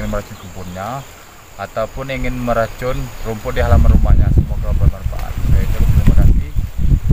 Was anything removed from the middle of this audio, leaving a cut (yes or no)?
no